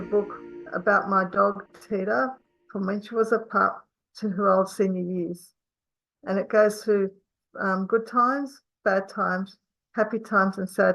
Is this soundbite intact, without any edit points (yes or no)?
yes